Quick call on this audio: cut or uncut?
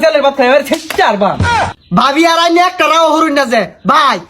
cut